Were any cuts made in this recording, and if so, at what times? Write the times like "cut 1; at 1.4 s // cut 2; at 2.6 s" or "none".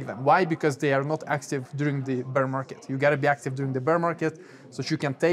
none

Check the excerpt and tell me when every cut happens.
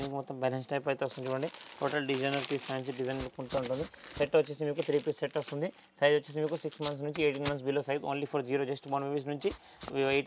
none

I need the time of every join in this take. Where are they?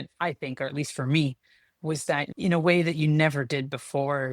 cut 1; at 2.3 s

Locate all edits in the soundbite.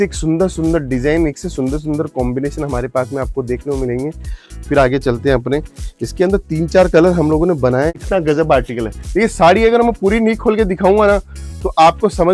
cut 1; at 7.9 s

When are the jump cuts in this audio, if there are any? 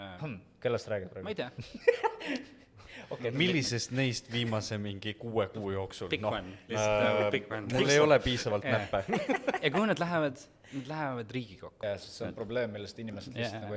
cut 1; at 11.8 s

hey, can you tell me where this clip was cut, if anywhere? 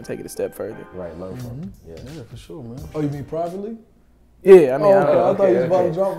cut 1; at 2.9 s

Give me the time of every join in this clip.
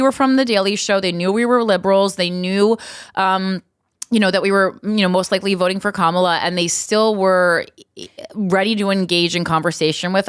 none

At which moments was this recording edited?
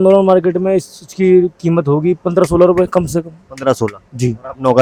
none

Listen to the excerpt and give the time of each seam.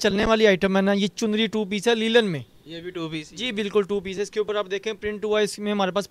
none

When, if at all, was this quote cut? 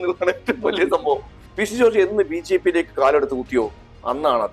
cut 1; at 1.4 s

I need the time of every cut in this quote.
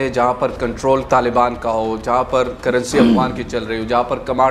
cut 1; at 1.0 s

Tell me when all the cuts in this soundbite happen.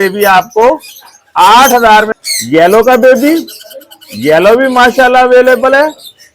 cut 1; at 2.1 s

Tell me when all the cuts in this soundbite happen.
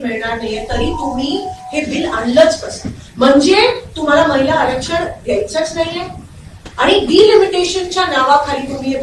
cut 1; at 6.6 s

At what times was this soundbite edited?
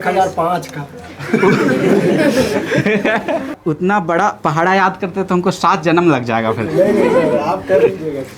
cut 1; at 3.6 s

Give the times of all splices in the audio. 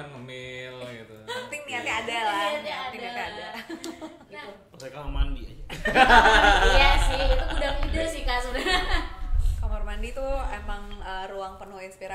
cut 1; at 4.3 s

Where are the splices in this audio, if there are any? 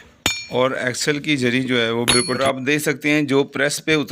cut 1; at 2.4 s

